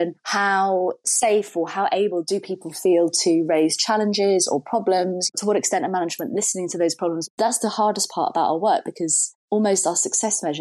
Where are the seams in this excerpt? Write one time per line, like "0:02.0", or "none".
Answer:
0:07.3